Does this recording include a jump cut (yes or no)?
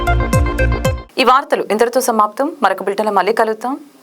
no